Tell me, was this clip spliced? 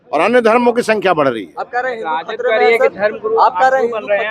no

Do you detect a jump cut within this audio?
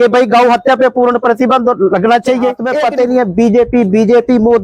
yes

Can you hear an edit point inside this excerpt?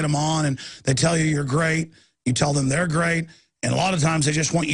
no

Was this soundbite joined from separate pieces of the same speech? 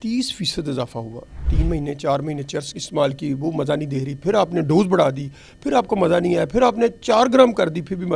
yes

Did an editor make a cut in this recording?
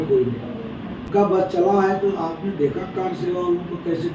yes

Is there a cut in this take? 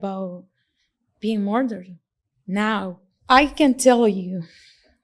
yes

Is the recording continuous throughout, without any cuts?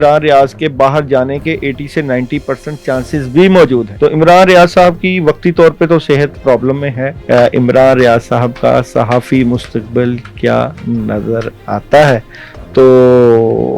no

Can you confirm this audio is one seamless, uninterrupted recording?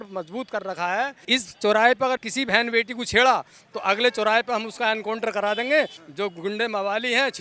no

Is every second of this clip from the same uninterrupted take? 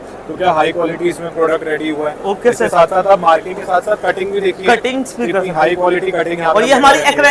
yes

